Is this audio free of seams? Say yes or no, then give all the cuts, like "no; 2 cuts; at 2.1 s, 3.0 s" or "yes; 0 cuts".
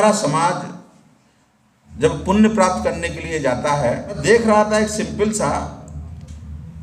no; 1 cut; at 4.2 s